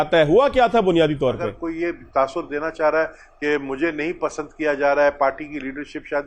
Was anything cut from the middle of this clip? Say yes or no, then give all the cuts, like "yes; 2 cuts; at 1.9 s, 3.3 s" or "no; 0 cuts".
yes; 1 cut; at 1.6 s